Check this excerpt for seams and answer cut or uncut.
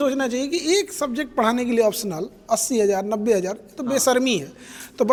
uncut